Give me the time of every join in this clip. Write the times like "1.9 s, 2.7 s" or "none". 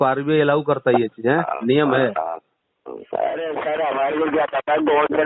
none